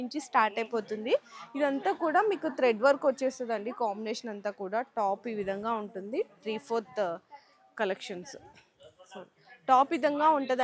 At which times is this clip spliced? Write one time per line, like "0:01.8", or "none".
none